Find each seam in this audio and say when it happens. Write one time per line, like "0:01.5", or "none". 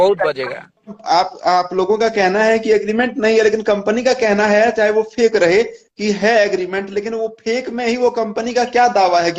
0:00.9